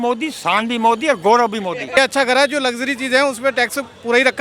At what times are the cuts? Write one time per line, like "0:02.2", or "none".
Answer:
0:02.0